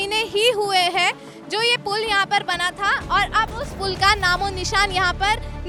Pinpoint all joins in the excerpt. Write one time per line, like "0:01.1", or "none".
none